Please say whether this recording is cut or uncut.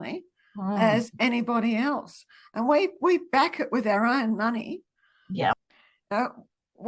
uncut